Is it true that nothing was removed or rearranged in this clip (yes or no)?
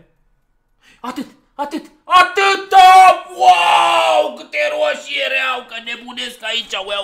yes